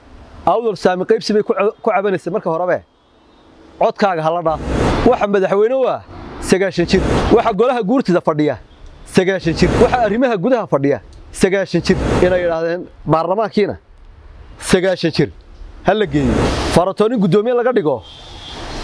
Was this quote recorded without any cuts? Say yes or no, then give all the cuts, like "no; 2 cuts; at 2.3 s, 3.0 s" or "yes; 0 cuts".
no; 5 cuts; at 4.8 s, 7.1 s, 9.8 s, 12.1 s, 16.5 s